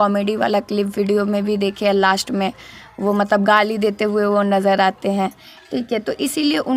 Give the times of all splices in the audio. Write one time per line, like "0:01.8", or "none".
none